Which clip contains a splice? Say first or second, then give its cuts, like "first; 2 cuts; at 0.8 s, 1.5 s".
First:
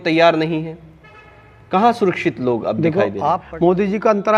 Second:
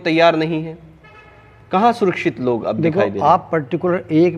first; 1 cut; at 3.4 s